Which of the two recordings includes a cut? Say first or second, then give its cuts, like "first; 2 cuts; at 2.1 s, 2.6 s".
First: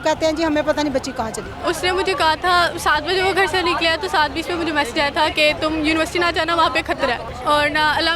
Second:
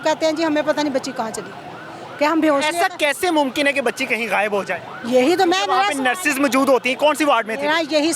first; 2 cuts; at 1.6 s, 7.3 s